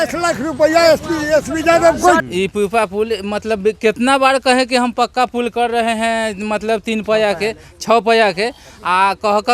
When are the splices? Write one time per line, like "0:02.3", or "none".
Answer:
0:02.2